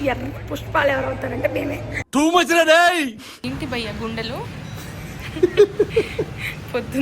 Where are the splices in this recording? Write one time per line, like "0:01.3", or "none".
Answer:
0:03.5